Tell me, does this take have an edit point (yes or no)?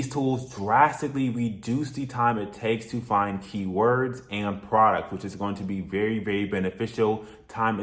no